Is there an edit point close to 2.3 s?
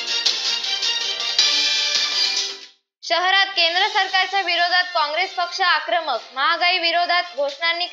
yes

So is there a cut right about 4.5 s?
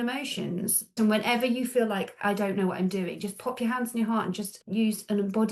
yes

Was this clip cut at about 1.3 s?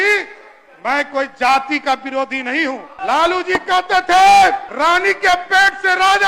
no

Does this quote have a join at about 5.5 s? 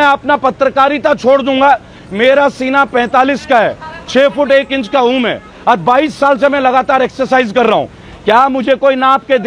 no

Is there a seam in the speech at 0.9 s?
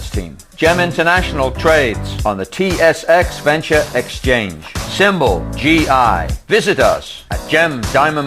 no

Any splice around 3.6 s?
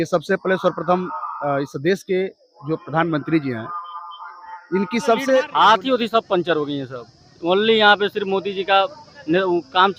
no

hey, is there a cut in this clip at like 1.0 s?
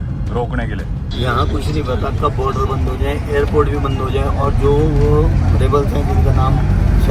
yes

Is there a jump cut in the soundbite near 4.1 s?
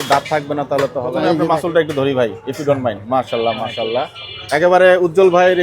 no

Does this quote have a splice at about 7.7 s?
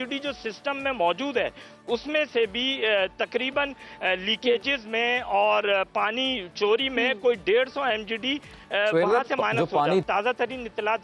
no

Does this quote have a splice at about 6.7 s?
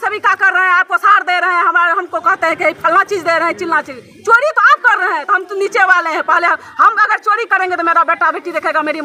no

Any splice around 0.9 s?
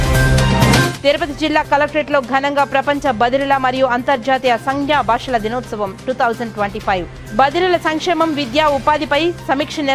no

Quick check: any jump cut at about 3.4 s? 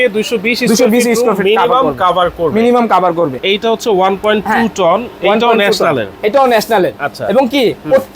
yes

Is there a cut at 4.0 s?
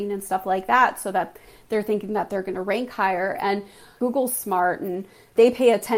yes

